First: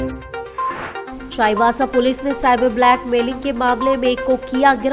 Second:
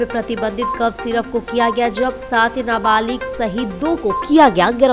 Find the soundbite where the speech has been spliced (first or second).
first